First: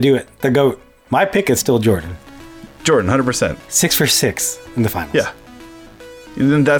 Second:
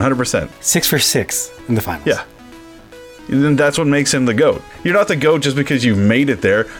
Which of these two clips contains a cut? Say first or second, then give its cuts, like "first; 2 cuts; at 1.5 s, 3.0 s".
second; 1 cut; at 4.7 s